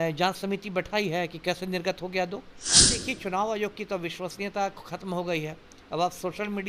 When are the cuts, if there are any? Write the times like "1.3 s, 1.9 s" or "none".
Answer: 2.9 s